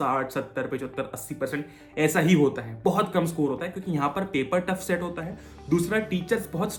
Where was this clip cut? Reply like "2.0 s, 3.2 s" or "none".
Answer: none

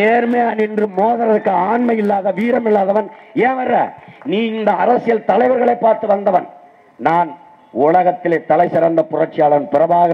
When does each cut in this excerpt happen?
none

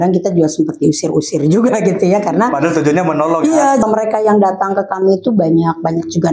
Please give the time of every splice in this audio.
3.8 s

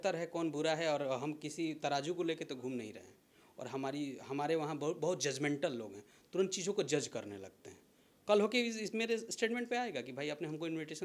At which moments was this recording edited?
none

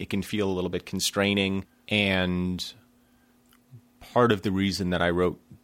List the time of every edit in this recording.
1.7 s

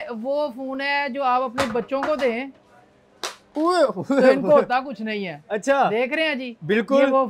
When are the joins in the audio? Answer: none

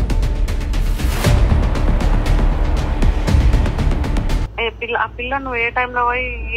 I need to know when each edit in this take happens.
4.5 s

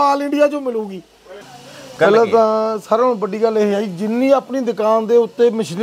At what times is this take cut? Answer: 1.4 s

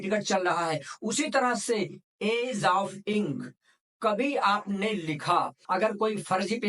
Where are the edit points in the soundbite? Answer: 5.6 s

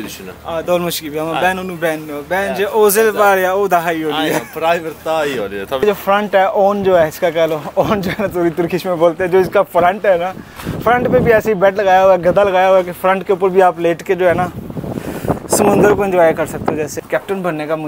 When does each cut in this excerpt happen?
5.8 s, 17.0 s

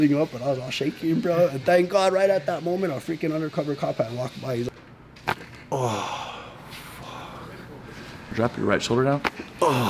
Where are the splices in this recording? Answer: 4.7 s, 8.3 s

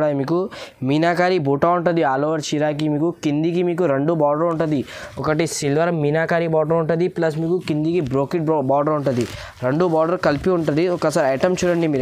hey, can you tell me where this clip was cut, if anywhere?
none

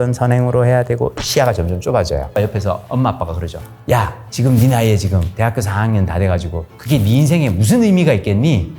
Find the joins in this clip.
2.5 s, 3.9 s

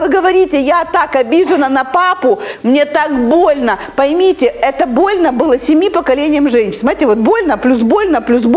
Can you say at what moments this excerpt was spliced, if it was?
none

